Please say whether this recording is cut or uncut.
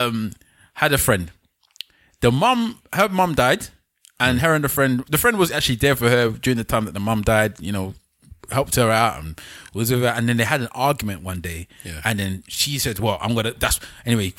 uncut